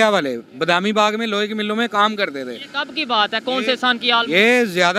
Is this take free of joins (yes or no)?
yes